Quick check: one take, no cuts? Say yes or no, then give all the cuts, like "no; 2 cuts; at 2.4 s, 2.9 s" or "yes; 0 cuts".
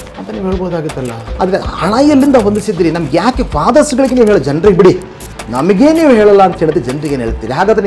no; 1 cut; at 1.2 s